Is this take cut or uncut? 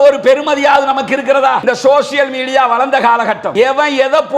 cut